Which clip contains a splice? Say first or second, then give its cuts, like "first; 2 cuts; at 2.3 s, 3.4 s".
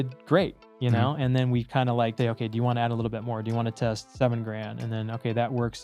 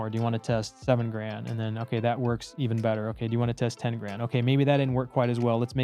first; 1 cut; at 2.1 s